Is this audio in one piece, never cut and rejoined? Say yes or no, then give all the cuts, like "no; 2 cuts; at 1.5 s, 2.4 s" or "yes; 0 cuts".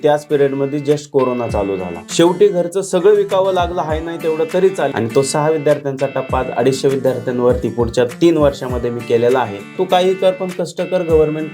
no; 3 cuts; at 2.0 s, 4.9 s, 9.8 s